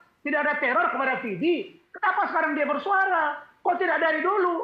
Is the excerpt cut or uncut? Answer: uncut